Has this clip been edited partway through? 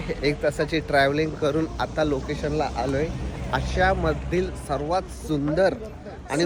no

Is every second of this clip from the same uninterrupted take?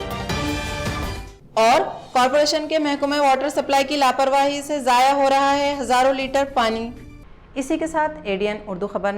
yes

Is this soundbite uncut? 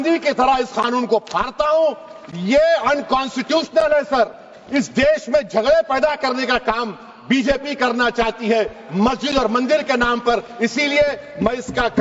yes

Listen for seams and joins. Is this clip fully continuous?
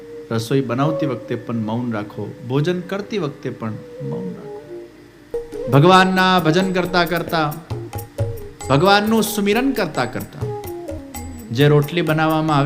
no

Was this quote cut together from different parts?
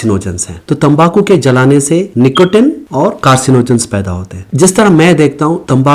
yes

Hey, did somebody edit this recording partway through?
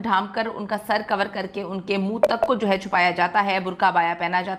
no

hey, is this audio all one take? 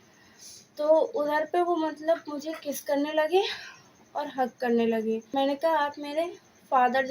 no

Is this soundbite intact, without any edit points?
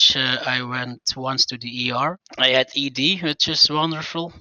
no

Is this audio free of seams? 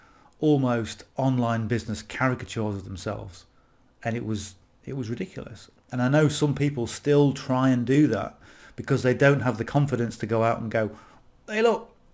yes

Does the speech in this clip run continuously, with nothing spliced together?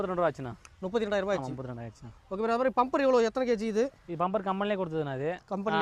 yes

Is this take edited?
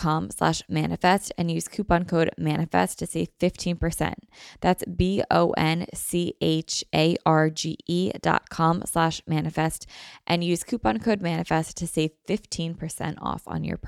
no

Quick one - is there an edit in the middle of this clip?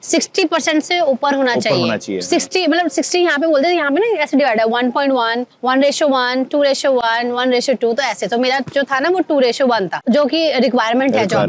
no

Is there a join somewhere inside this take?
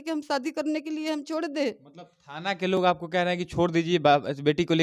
no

